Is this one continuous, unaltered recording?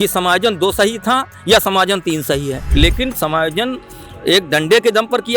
no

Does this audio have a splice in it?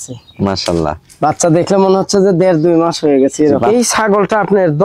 yes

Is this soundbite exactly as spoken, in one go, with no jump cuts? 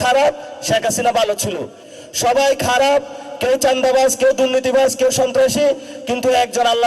no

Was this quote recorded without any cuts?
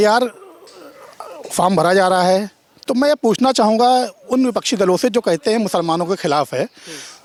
yes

